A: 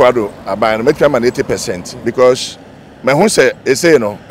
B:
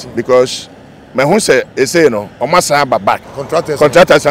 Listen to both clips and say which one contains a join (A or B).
B